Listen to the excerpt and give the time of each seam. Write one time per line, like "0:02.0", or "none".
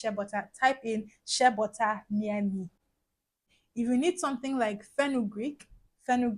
0:03.5